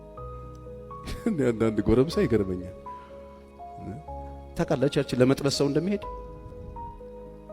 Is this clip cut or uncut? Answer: cut